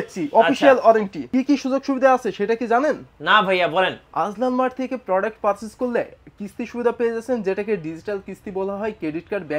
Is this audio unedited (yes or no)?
no